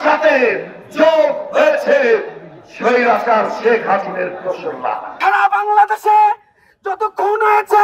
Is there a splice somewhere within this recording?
yes; 1 cut; at 5.2 s

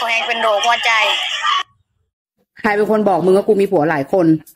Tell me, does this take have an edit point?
yes; 1 cut; at 2.1 s

